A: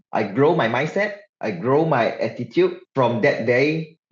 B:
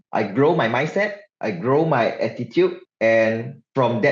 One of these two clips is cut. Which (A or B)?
A